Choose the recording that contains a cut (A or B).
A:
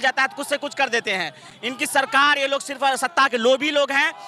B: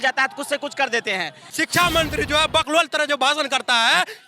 B